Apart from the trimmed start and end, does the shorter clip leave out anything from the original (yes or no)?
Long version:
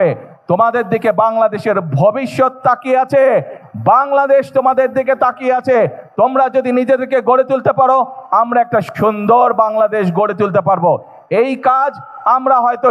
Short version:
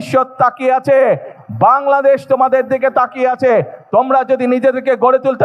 no